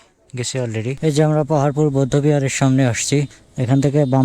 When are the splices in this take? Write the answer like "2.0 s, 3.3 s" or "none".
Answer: 1.0 s